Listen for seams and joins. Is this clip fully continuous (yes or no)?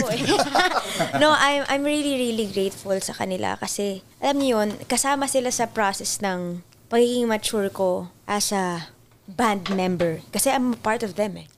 no